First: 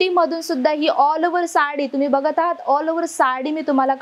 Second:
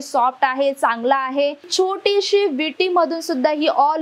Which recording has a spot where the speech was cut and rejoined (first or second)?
second